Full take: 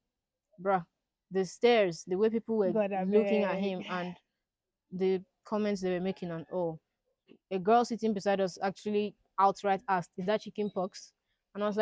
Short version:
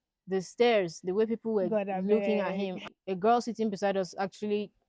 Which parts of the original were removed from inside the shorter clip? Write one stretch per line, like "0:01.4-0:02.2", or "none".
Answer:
0:03.9-0:07.3